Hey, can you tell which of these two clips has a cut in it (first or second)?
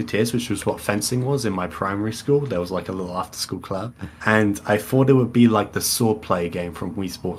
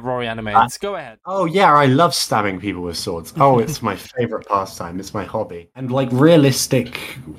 second